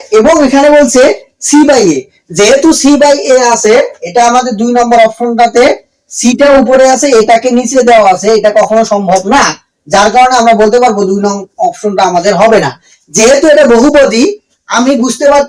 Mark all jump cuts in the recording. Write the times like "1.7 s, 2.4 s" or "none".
none